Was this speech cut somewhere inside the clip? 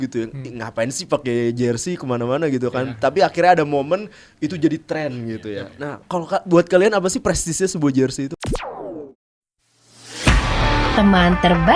yes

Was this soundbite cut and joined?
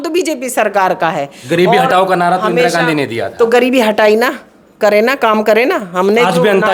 no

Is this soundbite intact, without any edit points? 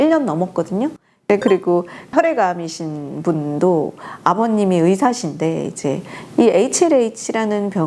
no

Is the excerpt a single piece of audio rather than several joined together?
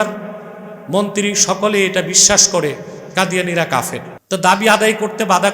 no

